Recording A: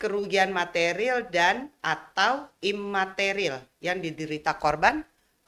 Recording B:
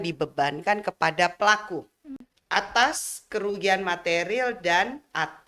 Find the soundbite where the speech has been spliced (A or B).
B